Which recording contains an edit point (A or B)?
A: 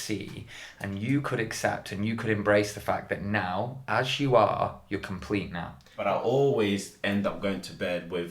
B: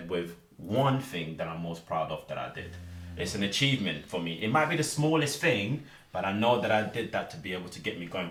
A